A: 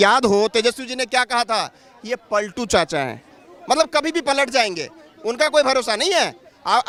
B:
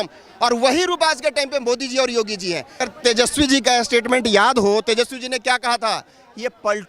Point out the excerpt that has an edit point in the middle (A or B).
B